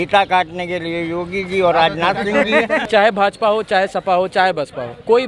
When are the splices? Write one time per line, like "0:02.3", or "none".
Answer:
0:02.8